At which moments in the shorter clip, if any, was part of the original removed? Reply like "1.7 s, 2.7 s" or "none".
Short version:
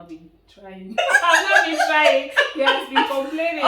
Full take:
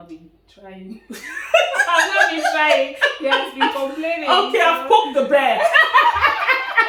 1.0 s